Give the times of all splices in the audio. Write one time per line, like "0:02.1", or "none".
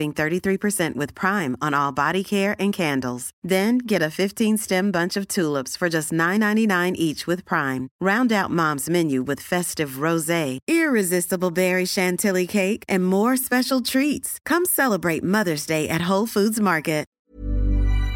0:17.2